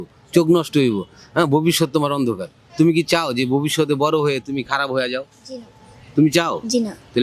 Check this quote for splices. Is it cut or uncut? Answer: uncut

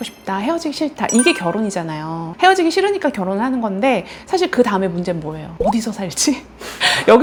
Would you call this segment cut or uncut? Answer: uncut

